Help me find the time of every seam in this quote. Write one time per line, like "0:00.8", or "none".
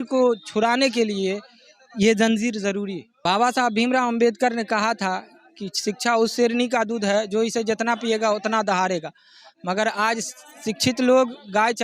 0:03.0

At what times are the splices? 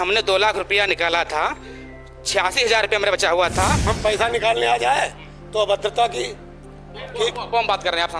0:03.9

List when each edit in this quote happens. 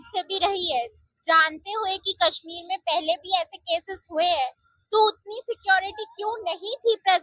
none

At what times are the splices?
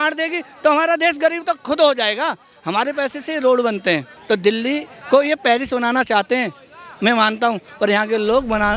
0:04.1

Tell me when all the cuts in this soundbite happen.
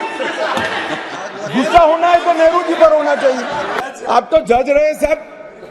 0:03.8

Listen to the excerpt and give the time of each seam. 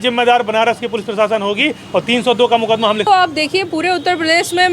0:03.1

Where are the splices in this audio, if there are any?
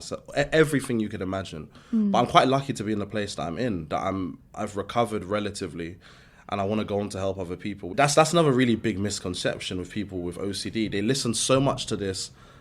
0:07.8

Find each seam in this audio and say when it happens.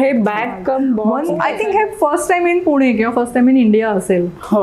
0:01.1

